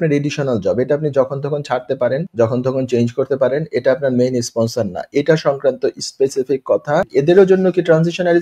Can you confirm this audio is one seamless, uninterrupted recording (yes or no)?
no